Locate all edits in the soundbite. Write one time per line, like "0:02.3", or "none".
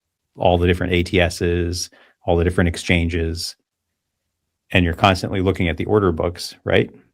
none